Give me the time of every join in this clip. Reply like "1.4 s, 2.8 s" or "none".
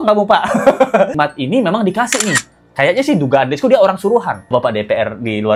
1.1 s, 4.5 s